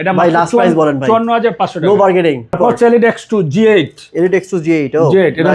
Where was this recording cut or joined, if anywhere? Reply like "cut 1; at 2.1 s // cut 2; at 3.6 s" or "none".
cut 1; at 2.6 s

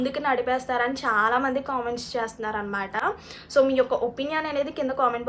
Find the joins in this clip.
none

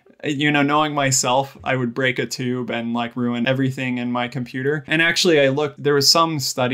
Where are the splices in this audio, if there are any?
cut 1; at 3.5 s // cut 2; at 4.9 s // cut 3; at 5.8 s

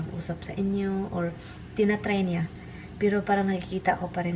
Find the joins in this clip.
none

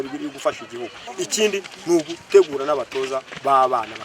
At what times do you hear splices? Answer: cut 1; at 1.0 s

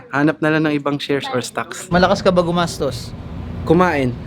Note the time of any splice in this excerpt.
cut 1; at 1.9 s

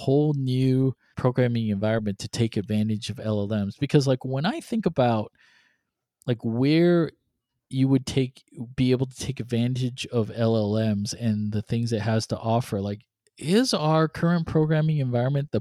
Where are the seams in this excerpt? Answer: cut 1; at 1.1 s

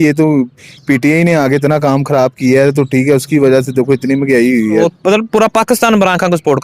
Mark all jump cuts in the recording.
cut 1; at 4.8 s

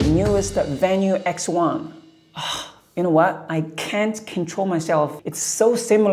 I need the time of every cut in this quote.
cut 1; at 3.4 s // cut 2; at 5.2 s

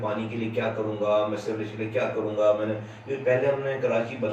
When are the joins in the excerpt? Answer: none

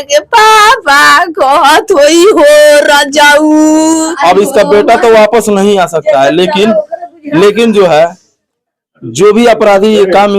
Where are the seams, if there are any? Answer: cut 1; at 4.1 s

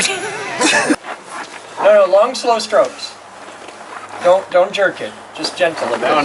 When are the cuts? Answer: cut 1; at 1.0 s

